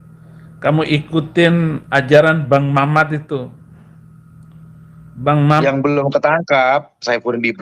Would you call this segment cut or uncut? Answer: cut